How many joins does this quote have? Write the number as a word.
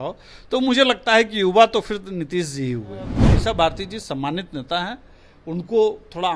one